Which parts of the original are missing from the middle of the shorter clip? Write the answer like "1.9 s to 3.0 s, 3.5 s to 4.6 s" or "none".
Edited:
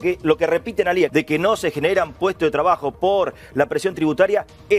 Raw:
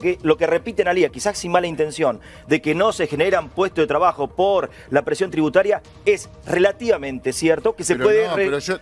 1.1 s to 2.5 s